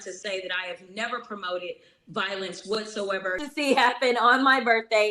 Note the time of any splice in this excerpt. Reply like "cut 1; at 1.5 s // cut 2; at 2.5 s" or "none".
cut 1; at 3.4 s